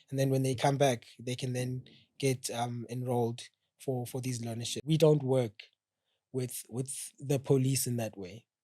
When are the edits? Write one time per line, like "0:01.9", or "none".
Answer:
0:04.8

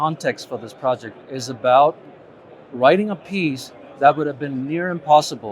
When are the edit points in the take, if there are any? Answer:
none

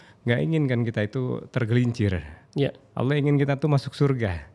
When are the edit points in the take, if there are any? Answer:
none

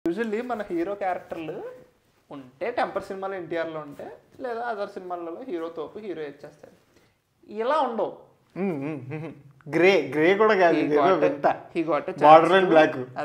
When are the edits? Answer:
none

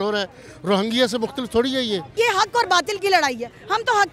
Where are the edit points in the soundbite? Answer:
0:02.1

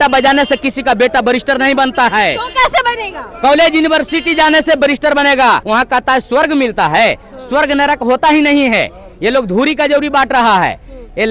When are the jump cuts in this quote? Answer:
0:05.6

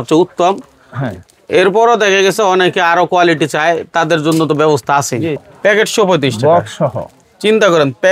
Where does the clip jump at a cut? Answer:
0:05.3

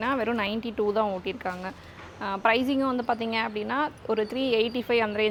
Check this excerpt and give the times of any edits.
none

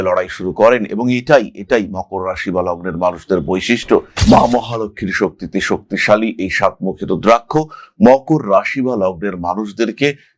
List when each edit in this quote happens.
0:04.1

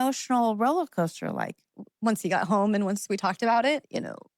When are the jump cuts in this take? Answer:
0:01.7

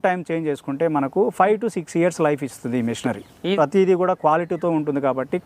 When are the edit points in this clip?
0:03.6

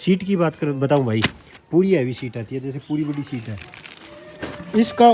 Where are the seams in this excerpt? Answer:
none

